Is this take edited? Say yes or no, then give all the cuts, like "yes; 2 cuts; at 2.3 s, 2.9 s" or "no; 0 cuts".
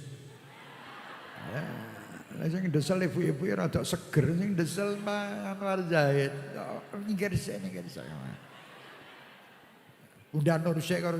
no; 0 cuts